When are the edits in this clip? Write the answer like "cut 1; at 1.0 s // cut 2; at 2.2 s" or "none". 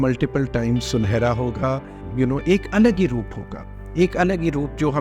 cut 1; at 2.0 s